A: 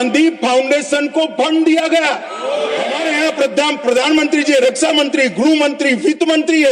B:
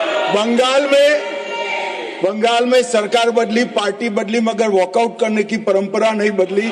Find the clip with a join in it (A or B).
A